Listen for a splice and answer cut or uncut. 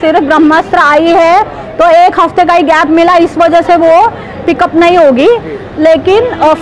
uncut